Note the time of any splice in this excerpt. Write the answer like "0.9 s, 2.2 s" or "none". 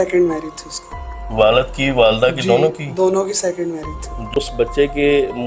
4.3 s